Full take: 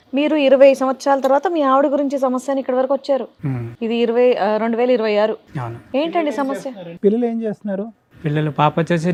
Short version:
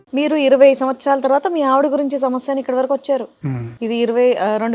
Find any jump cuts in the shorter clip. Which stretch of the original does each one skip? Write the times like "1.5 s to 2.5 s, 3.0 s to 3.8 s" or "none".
none